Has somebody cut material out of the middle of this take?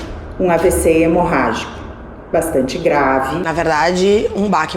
no; 0 cuts

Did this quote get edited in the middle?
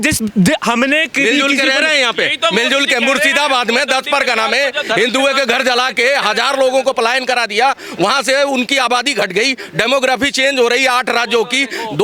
no; 0 cuts

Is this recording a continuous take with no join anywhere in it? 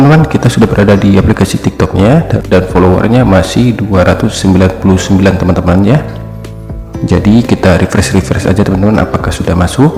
yes; 0 cuts

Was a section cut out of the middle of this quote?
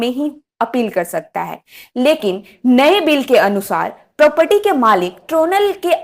no; 0 cuts

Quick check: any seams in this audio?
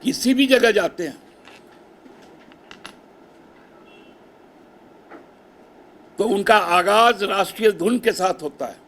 no; 0 cuts

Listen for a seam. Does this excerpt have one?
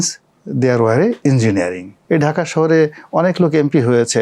yes; 1 cut; at 1.9 s

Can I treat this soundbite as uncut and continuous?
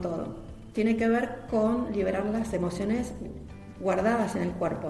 no; 1 cut; at 3.5 s

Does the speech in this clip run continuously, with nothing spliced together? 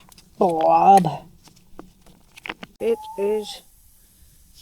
no; 1 cut; at 2.7 s

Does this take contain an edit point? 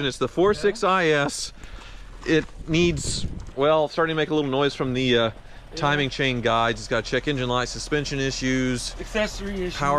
no; 0 cuts

